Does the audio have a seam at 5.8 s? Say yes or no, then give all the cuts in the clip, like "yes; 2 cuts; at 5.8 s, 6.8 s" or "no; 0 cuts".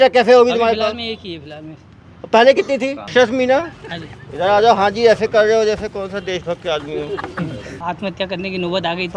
no; 2 cuts; at 3.0 s, 7.8 s